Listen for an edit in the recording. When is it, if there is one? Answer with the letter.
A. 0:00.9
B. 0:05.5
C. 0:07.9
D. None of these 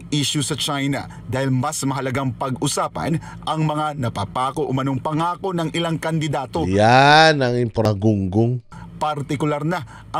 C